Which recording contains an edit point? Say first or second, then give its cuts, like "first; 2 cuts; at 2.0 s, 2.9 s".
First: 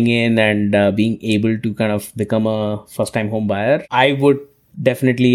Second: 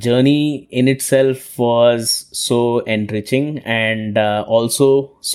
first; 1 cut; at 3.8 s